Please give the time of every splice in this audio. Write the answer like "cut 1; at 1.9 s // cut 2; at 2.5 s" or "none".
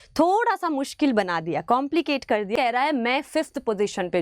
cut 1; at 2.5 s